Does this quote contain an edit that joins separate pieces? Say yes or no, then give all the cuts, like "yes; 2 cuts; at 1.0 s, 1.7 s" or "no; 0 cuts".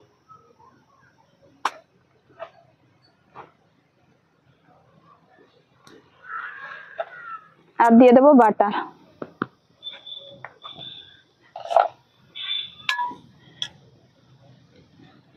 no; 0 cuts